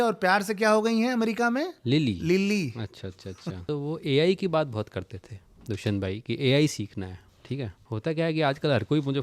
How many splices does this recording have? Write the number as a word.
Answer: two